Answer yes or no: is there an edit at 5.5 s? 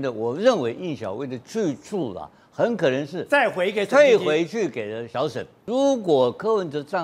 yes